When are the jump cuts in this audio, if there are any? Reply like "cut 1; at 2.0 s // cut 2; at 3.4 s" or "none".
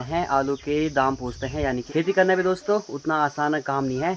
cut 1; at 1.8 s